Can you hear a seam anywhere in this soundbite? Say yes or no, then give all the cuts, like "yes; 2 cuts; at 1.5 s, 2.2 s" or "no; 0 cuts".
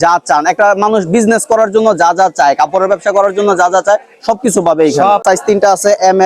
yes; 1 cut; at 5.2 s